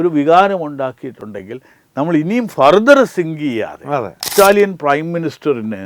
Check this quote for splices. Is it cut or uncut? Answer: cut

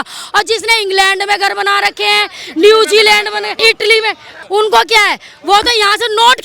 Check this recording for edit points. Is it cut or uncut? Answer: cut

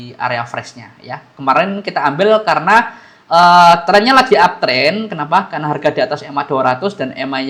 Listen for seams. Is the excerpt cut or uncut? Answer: uncut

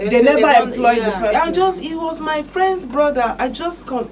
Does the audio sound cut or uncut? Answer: uncut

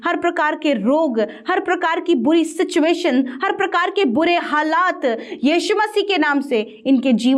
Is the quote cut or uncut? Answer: uncut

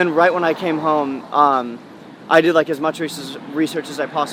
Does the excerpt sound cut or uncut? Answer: uncut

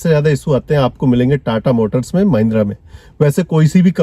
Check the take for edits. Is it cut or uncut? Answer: uncut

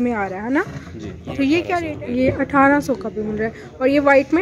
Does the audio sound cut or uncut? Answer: cut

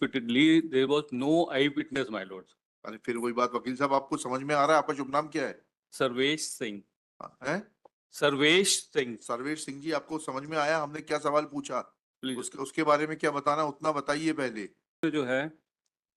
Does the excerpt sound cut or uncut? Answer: cut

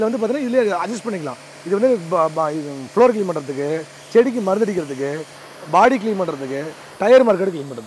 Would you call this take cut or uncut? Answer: uncut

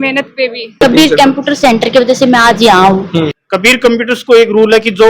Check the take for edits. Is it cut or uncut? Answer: cut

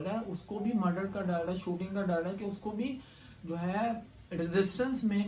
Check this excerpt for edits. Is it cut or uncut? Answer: uncut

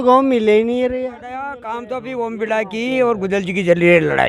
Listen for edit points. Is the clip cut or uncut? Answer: cut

